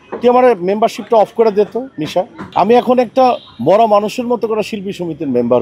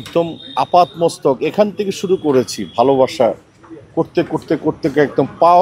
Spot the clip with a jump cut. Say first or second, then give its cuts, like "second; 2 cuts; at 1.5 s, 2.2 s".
first; 1 cut; at 2.4 s